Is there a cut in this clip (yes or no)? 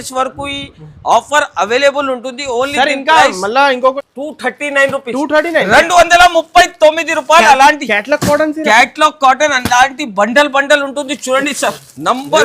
yes